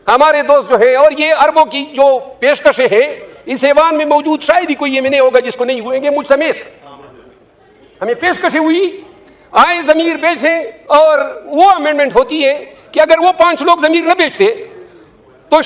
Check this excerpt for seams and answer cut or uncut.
uncut